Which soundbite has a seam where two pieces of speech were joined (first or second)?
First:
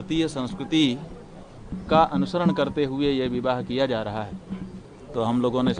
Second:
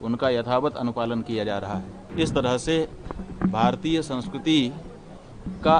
second